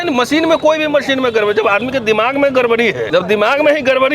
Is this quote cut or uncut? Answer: cut